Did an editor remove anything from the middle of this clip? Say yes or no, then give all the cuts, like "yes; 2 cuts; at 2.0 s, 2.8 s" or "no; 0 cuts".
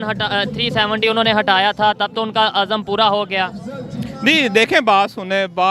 no; 0 cuts